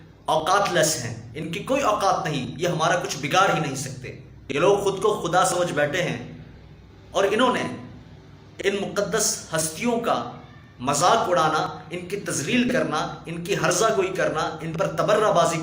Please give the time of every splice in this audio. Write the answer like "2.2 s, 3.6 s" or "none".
none